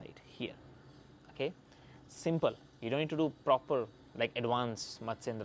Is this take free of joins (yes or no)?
yes